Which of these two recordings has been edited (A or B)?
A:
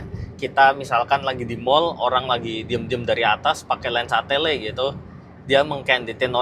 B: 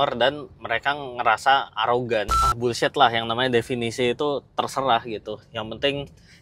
B